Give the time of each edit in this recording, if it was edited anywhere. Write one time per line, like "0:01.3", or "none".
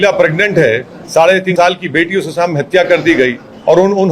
0:01.5

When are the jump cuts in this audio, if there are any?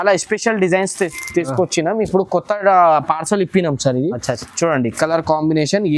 none

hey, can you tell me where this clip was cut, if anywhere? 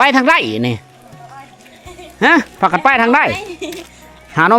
none

